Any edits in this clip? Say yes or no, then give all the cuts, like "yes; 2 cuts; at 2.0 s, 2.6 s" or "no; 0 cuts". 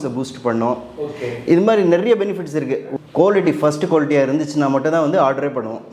yes; 1 cut; at 2.9 s